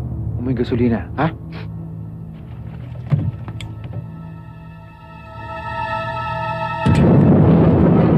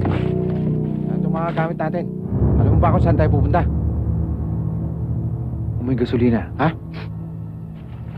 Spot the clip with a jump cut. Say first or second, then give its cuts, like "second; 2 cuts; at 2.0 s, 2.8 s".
second; 1 cut; at 1.3 s